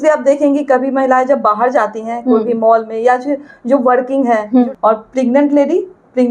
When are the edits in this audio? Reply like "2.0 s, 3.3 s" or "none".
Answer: 4.7 s